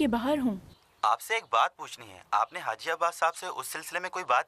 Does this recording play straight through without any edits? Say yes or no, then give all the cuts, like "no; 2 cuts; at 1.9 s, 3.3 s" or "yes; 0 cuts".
yes; 0 cuts